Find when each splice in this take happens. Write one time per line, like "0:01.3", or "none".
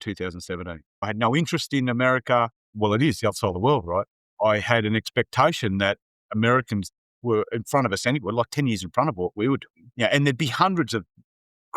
0:01.1
0:02.7